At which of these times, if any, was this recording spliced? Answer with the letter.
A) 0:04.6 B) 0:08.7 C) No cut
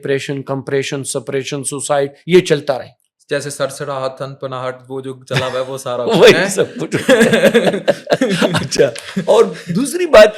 C